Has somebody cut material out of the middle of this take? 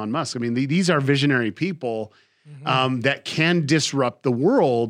no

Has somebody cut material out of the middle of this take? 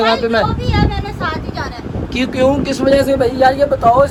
no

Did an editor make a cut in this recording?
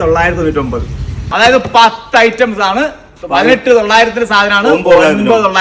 yes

